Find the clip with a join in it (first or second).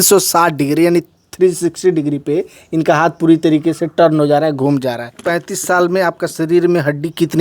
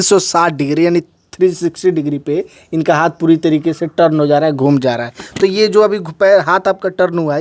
first